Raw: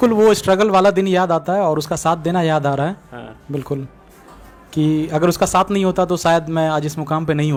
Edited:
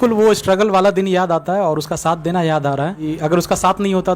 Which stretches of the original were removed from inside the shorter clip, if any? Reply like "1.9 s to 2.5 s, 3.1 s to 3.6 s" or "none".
3.0 s to 5.0 s